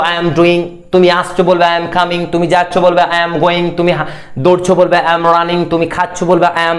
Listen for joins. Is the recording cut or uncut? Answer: uncut